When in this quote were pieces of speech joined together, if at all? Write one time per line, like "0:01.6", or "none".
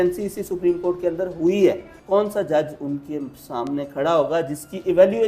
0:01.9